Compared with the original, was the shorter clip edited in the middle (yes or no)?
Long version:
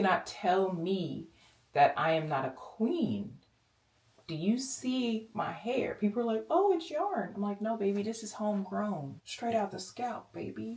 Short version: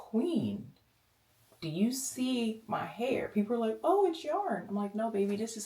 no